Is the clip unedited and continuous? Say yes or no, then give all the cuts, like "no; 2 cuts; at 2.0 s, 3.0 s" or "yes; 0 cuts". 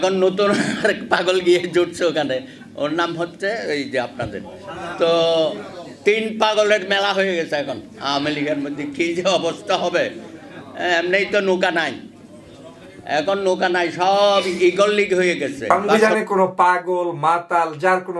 no; 1 cut; at 15.6 s